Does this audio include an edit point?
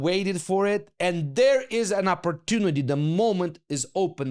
no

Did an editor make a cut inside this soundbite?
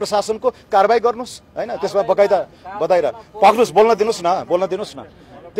no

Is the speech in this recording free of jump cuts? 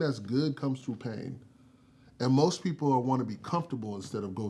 yes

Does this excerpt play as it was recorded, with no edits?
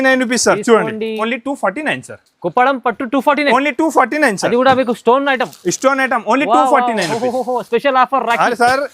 no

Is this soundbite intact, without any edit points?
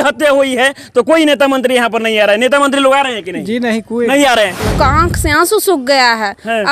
no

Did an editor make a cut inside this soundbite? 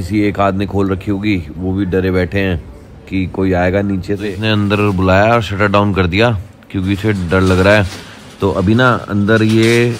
yes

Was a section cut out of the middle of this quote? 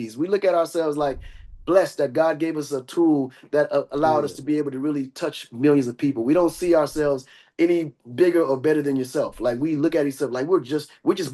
no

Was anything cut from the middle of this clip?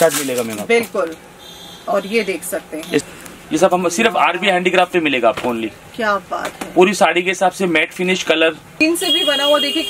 yes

